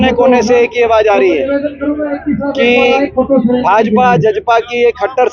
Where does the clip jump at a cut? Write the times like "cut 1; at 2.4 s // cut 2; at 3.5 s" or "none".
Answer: none